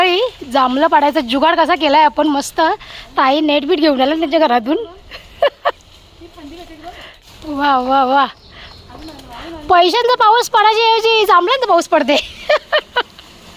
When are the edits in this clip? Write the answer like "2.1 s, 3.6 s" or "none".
7.2 s